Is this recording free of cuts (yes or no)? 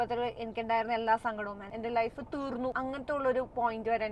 no